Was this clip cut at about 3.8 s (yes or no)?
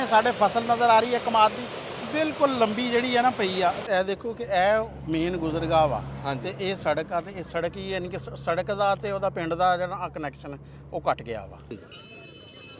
yes